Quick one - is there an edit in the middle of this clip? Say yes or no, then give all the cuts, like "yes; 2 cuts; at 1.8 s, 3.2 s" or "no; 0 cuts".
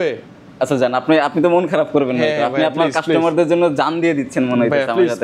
no; 0 cuts